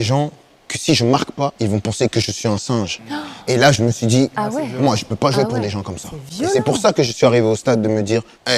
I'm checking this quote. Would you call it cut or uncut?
uncut